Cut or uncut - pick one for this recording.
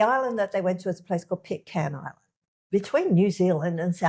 cut